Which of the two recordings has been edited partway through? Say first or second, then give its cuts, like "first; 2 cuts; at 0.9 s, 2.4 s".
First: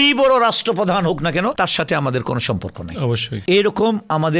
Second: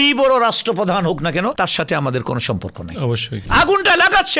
second; 1 cut; at 3.4 s